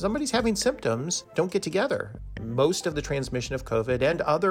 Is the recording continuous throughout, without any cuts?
no; 2 cuts; at 1.2 s, 2.4 s

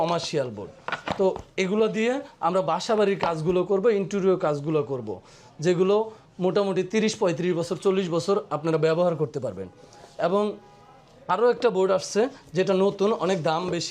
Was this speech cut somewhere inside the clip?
no; 0 cuts

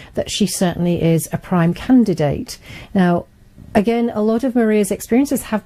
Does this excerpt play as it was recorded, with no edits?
yes; 0 cuts

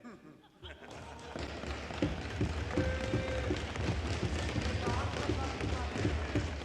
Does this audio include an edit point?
no; 0 cuts

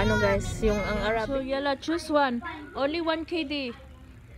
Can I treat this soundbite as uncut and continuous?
no; 1 cut; at 1.2 s

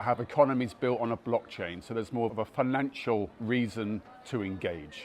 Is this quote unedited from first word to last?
no; 2 cuts; at 2.3 s, 3.4 s

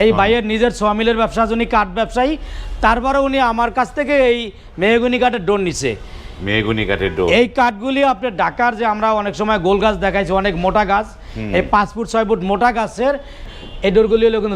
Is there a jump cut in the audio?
yes; 1 cut; at 13.5 s

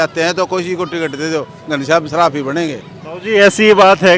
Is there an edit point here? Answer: no; 0 cuts

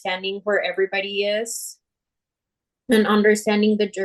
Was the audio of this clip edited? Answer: no; 0 cuts

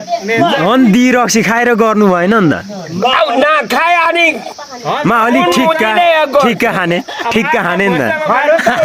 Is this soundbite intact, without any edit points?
yes; 0 cuts

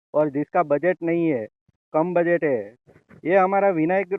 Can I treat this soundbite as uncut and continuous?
no; 1 cut; at 2.8 s

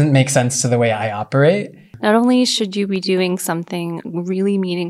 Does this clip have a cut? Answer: yes; 1 cut; at 1.8 s

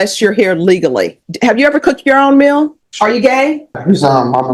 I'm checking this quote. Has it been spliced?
yes; 3 cuts; at 1.2 s, 2.8 s, 3.8 s

